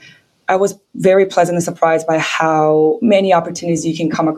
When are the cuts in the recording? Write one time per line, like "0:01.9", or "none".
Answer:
0:03.0